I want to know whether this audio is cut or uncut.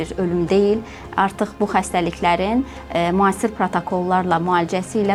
uncut